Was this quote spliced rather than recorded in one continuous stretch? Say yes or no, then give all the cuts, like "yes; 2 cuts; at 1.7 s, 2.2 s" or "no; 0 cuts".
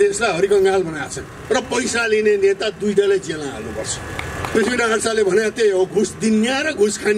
yes; 2 cuts; at 1.3 s, 4.5 s